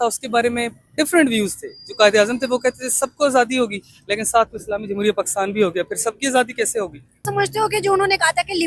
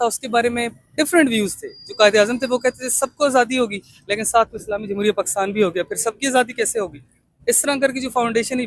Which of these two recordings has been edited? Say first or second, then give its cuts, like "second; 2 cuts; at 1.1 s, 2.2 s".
first; 1 cut; at 7.2 s